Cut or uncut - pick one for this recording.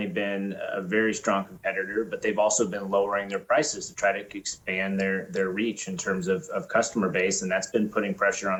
uncut